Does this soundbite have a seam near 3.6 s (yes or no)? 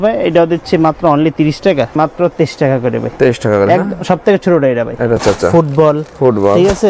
no